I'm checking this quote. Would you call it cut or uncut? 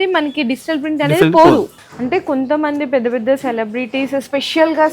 cut